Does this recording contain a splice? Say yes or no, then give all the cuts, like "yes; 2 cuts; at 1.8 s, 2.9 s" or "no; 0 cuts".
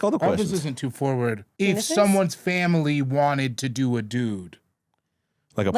yes; 1 cut; at 1.5 s